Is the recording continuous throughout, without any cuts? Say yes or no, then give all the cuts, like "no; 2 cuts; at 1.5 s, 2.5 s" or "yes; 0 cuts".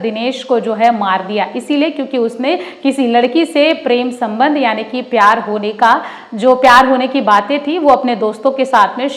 yes; 0 cuts